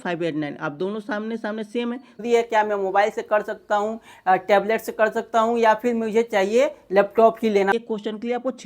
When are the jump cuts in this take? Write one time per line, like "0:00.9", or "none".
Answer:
0:02.2
0:07.7